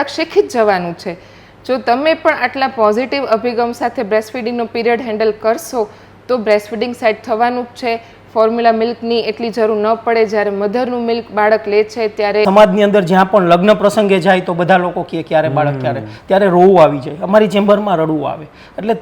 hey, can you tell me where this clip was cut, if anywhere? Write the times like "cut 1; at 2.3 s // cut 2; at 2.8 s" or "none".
cut 1; at 12.4 s